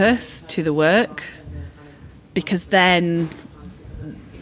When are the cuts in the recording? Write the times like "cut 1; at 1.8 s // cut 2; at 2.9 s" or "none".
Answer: none